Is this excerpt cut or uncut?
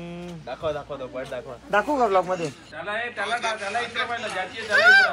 cut